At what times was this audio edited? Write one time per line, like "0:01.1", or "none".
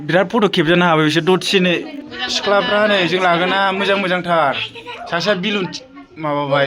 0:02.0